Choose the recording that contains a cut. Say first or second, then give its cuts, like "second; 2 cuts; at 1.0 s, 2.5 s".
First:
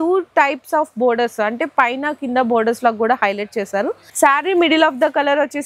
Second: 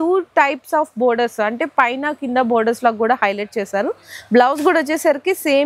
first; 1 cut; at 4.0 s